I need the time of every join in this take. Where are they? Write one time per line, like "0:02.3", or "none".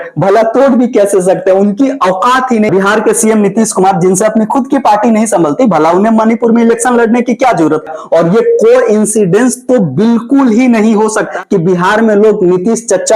0:02.7
0:08.0